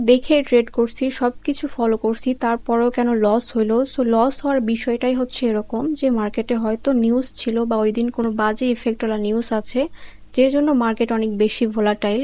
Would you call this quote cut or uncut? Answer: uncut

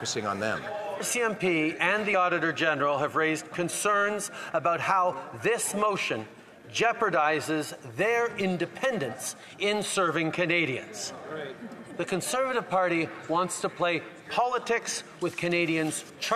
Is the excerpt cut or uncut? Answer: cut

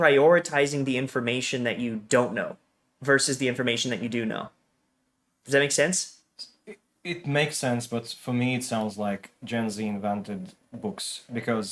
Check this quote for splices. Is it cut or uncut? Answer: uncut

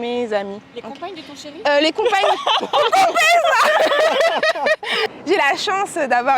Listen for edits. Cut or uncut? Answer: cut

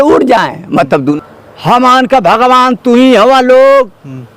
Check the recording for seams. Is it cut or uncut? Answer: cut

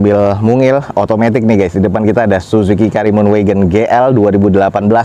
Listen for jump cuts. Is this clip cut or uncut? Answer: uncut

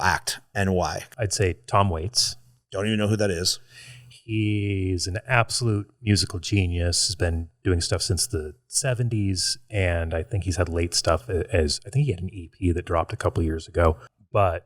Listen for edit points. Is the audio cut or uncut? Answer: cut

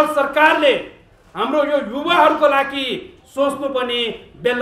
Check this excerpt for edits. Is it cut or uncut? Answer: uncut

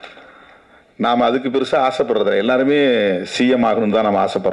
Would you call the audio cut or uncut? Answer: uncut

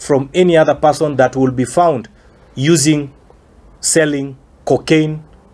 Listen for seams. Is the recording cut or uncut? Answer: uncut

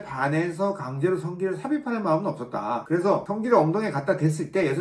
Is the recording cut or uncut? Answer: uncut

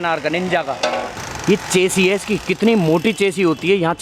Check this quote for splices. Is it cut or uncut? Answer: cut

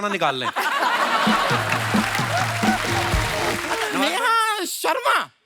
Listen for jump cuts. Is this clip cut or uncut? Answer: cut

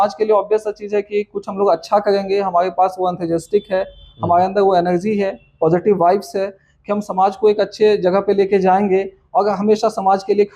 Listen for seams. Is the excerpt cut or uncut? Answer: uncut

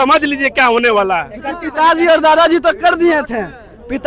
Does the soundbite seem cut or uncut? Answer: uncut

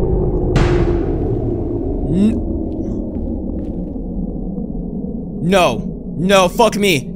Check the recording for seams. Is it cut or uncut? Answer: uncut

